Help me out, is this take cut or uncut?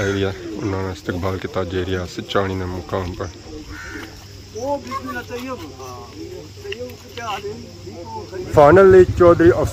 uncut